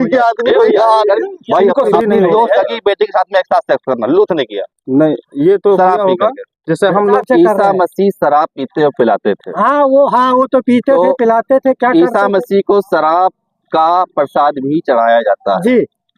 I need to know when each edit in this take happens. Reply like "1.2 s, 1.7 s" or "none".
1.9 s, 7.2 s